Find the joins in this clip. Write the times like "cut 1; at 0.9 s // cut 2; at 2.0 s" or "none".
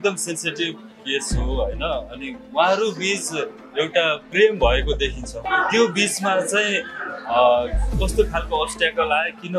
cut 1; at 3.9 s // cut 2; at 5.4 s